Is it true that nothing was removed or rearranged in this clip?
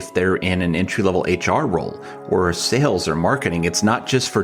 yes; 0 cuts

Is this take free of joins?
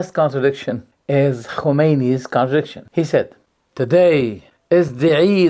no; 2 cuts; at 2.8 s, 4.5 s

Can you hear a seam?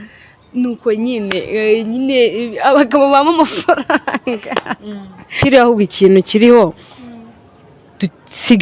yes; 1 cut; at 5.3 s

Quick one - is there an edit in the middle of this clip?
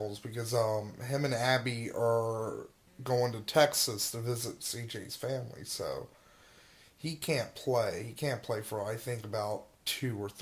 yes; 1 cut; at 7.4 s

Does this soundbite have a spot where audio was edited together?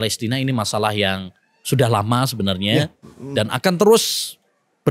no; 0 cuts

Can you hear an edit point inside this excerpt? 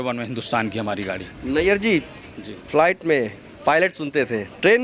no; 0 cuts

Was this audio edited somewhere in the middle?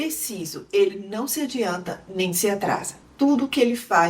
yes; 1 cut; at 2.9 s

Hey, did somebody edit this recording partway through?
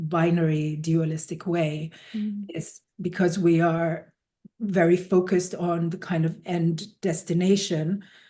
no; 0 cuts

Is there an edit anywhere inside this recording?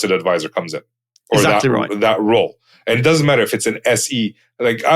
no; 0 cuts

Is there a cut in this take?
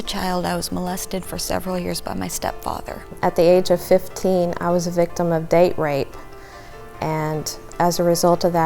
yes; 1 cut; at 3.1 s

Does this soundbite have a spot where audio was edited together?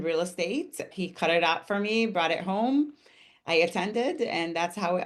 no; 0 cuts

